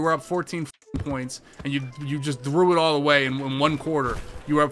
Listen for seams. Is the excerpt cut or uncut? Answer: uncut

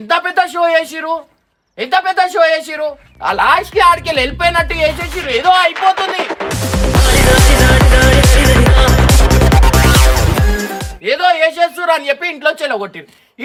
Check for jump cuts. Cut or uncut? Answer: uncut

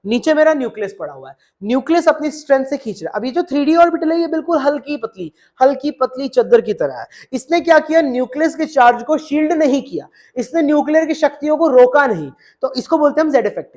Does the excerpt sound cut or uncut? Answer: uncut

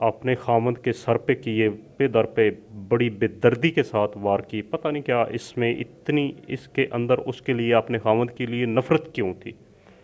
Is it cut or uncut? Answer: uncut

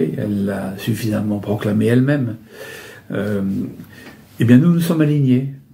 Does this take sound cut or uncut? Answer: uncut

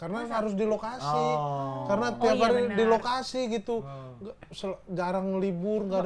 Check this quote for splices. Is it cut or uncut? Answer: uncut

